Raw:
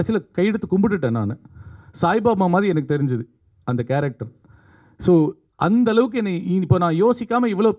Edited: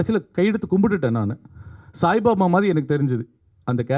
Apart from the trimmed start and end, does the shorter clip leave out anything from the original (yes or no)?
no